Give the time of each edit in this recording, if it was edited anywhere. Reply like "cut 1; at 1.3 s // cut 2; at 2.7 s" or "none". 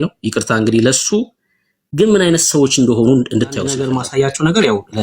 cut 1; at 3.8 s

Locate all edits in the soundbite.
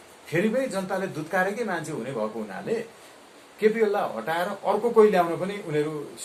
none

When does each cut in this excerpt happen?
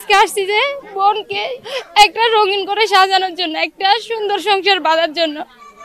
cut 1; at 0.8 s // cut 2; at 1.6 s

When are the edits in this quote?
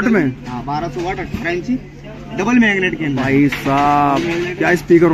none

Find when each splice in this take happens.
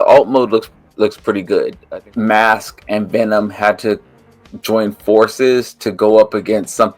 cut 1; at 1.8 s

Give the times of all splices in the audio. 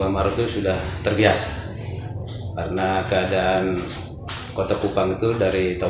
none

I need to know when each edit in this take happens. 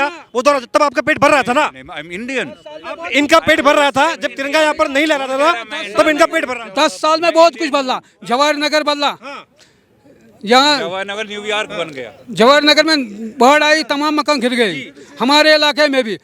none

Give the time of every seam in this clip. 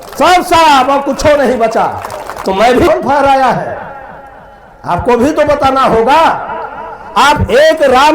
cut 1; at 2.9 s

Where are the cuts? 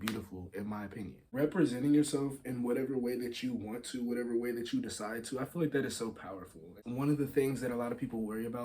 cut 1; at 1.3 s // cut 2; at 6.8 s

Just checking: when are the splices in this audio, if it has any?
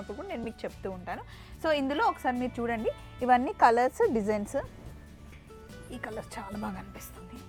none

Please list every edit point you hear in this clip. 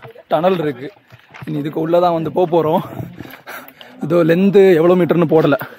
none

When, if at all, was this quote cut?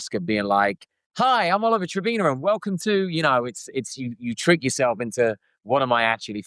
none

